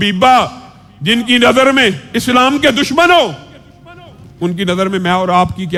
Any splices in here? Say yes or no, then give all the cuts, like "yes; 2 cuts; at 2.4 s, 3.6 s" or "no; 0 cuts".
no; 0 cuts